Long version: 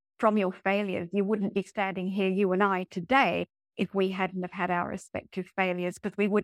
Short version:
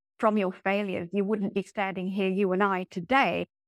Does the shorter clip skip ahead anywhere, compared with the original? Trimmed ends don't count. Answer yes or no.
no